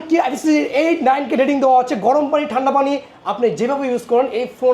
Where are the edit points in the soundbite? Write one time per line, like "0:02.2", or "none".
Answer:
none